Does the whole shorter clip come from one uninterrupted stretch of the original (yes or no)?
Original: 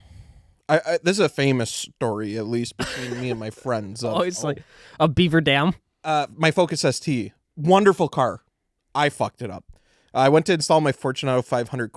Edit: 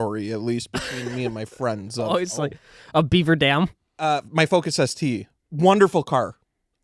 yes